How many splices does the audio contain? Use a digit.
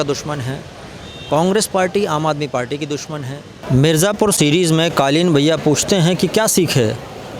1